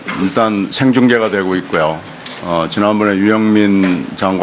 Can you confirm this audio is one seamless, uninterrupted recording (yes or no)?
yes